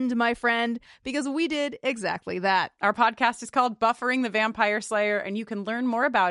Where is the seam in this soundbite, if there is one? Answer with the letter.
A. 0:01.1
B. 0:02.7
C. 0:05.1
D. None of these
B